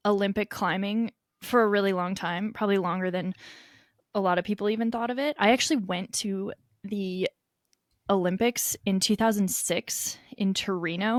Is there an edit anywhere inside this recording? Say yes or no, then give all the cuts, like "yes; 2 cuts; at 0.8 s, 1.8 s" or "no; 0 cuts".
no; 0 cuts